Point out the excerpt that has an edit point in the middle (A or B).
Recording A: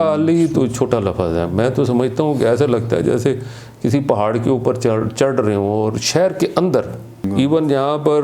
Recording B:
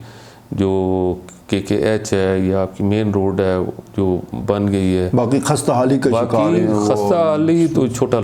A